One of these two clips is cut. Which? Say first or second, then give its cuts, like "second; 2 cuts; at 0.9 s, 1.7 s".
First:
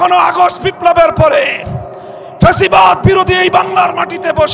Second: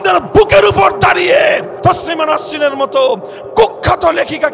second; 1 cut; at 1.7 s